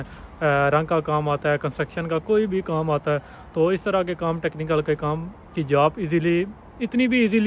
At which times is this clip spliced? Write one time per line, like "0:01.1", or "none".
none